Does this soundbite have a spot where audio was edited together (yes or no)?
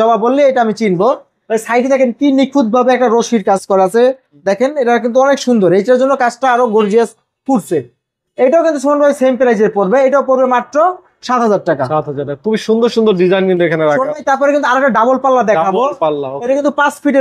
no